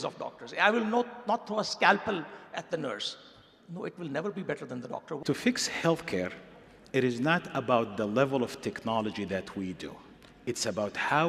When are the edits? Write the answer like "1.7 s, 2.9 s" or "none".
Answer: 5.2 s